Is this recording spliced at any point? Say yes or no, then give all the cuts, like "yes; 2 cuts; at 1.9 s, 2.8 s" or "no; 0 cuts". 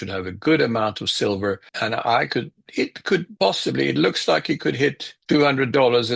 yes; 3 cuts; at 1.7 s, 3.3 s, 5.1 s